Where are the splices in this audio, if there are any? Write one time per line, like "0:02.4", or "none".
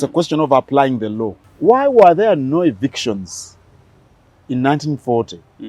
0:01.4